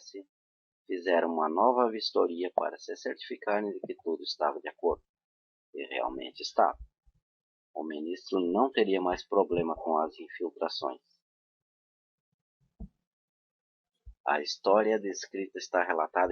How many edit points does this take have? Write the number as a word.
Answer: one